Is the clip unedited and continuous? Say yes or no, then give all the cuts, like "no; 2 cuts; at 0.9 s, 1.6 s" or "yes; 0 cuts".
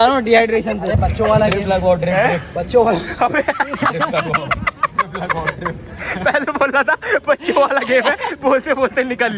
yes; 0 cuts